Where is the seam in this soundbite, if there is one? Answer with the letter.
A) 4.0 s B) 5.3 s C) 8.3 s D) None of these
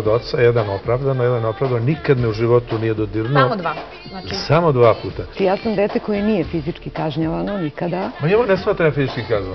B